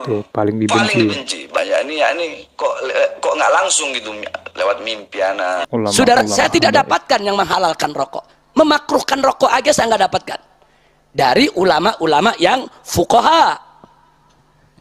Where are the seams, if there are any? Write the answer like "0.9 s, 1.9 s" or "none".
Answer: 5.6 s